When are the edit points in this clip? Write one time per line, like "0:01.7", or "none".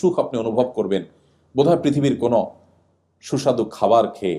none